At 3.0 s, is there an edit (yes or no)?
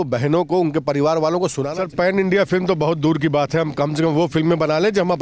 no